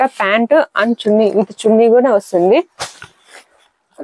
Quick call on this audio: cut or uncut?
uncut